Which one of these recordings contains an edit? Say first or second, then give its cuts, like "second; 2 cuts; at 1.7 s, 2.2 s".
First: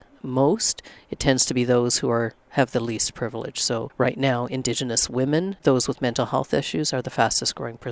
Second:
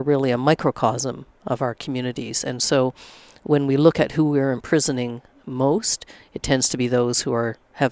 first; 2 cuts; at 3.9 s, 5.6 s